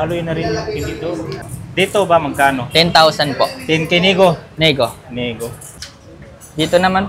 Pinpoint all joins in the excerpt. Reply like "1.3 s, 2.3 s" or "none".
1.4 s, 5.9 s